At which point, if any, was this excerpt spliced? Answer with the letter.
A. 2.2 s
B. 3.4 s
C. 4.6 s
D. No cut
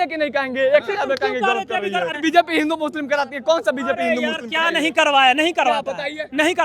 A